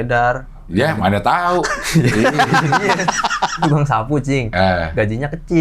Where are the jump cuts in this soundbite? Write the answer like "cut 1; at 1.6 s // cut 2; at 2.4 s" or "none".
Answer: cut 1; at 3.6 s